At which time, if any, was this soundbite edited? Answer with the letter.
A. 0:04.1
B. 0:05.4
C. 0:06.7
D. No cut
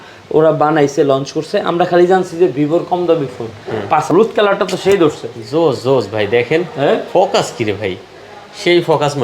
A